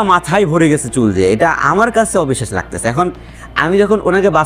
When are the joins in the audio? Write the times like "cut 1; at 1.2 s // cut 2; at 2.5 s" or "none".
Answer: none